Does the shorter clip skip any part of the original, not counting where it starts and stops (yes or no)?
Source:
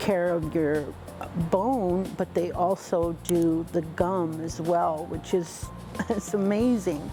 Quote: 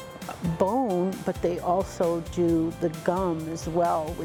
no